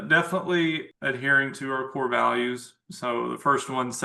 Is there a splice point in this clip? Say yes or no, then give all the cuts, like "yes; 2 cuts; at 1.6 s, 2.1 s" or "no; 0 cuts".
yes; 1 cut; at 0.9 s